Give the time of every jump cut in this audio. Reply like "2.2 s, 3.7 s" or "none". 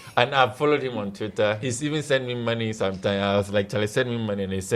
1.7 s